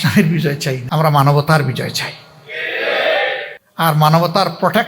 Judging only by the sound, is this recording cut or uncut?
cut